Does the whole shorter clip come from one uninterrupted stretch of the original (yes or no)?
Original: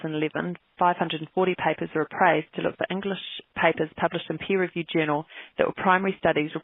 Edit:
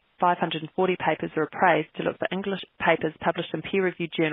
no